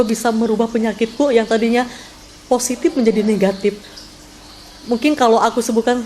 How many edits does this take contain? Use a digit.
0